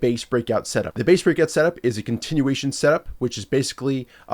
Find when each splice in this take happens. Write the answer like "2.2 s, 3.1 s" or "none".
1.0 s